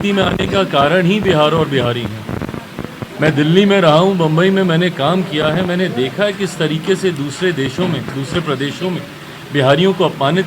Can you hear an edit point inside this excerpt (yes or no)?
no